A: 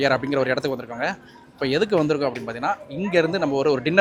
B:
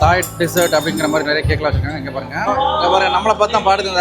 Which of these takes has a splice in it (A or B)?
B